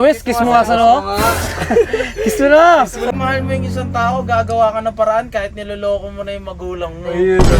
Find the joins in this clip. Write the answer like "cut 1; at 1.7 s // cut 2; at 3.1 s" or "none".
cut 1; at 3.1 s

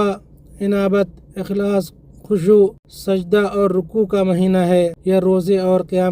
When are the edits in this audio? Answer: cut 1; at 2.9 s // cut 2; at 5.0 s

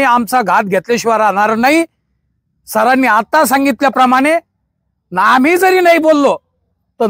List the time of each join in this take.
none

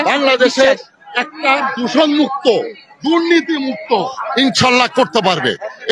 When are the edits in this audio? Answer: none

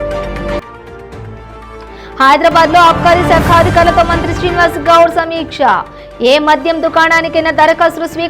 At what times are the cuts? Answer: cut 1; at 1.0 s

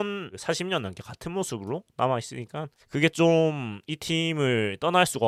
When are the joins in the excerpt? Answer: none

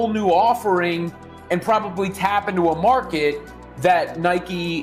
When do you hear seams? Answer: none

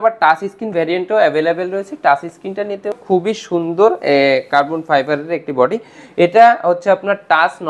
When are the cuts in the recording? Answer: cut 1; at 2.9 s

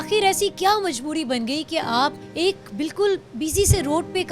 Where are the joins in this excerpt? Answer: cut 1; at 2.2 s

